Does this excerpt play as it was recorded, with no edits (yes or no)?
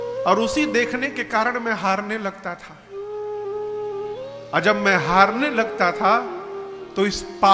yes